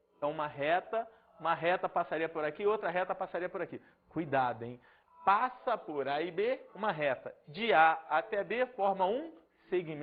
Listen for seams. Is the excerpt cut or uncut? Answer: uncut